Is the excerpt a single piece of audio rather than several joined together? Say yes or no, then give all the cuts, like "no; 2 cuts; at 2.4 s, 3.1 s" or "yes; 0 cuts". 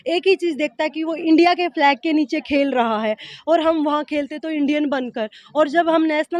yes; 0 cuts